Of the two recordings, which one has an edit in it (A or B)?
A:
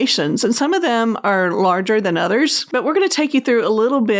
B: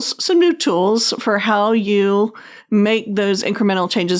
A